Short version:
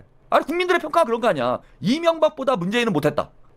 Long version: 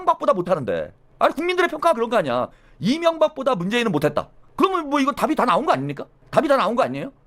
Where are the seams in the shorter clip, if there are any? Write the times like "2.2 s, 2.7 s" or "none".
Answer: 1.7 s